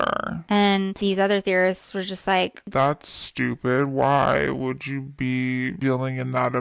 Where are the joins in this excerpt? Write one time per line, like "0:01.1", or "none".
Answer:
0:00.9
0:02.6

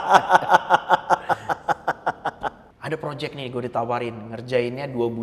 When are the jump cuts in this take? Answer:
0:02.7

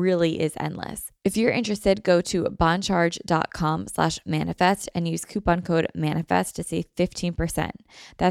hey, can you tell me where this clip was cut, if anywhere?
0:01.0

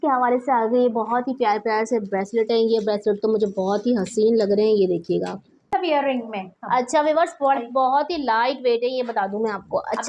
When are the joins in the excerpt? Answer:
0:05.6

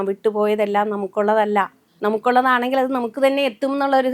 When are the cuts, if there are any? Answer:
0:01.8

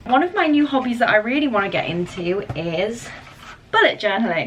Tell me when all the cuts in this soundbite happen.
none

